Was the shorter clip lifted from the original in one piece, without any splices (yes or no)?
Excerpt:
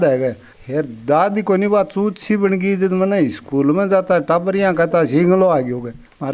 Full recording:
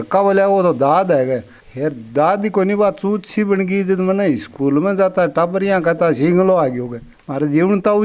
yes